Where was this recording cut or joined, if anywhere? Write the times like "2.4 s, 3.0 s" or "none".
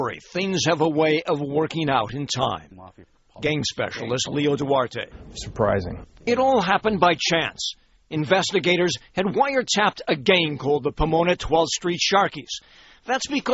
5.2 s